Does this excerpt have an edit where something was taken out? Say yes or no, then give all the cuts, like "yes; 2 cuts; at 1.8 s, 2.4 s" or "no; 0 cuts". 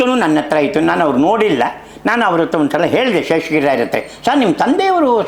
no; 0 cuts